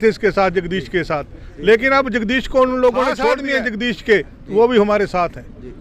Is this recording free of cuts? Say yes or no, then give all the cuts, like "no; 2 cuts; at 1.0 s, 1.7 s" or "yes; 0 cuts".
no; 1 cut; at 3.4 s